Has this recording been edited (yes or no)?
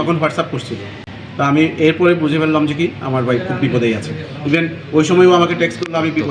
no